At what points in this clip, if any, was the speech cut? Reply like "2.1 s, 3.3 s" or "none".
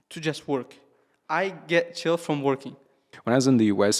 3.1 s